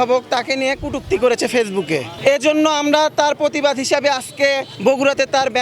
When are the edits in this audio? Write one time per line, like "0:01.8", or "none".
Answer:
0:02.1
0:04.7